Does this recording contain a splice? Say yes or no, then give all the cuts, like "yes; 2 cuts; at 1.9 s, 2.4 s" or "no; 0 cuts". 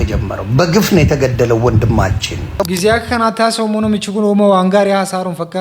yes; 1 cut; at 2.6 s